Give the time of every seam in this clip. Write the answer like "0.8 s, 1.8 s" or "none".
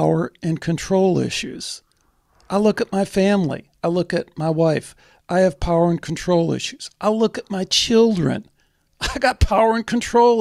none